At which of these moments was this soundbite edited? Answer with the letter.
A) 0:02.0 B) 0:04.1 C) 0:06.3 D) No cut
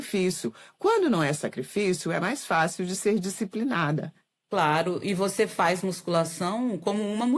D